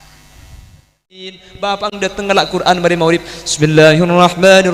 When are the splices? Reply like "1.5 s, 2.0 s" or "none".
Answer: 1.5 s